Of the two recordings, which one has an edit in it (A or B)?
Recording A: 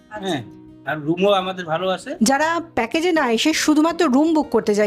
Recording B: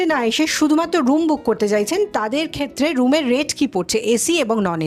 A